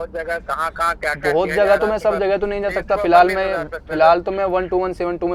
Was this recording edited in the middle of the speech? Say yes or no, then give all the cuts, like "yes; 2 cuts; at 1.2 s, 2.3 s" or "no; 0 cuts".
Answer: no; 0 cuts